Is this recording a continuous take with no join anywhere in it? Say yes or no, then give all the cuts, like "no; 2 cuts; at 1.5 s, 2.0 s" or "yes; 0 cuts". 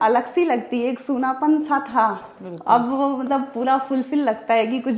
yes; 0 cuts